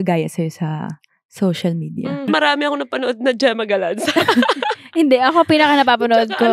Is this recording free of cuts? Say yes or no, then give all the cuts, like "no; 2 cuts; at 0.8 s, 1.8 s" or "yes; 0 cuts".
no; 1 cut; at 2.3 s